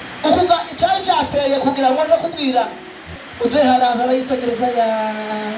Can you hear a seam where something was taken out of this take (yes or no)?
yes